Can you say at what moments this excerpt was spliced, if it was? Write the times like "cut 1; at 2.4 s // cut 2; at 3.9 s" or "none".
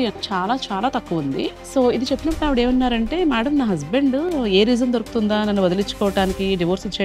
cut 1; at 1.6 s